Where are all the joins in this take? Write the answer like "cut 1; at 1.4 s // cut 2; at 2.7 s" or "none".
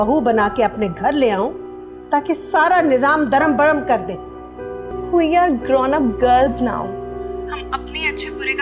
cut 1; at 4.9 s